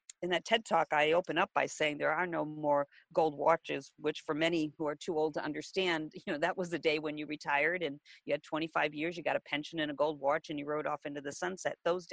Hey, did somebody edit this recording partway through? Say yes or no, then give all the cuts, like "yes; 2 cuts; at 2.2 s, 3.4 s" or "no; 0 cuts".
no; 0 cuts